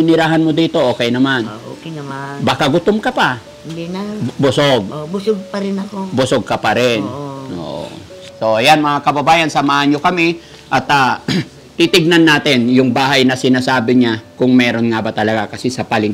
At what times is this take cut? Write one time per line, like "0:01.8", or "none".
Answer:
0:08.3